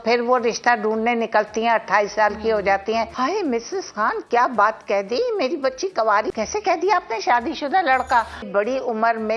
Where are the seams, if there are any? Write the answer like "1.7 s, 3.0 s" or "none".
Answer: 3.1 s, 6.3 s, 8.5 s